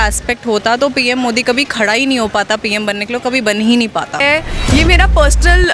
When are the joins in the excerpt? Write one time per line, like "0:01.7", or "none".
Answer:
0:04.2